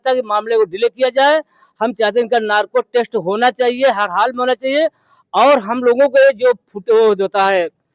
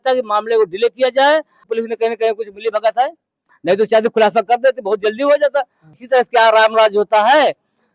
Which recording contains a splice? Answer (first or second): second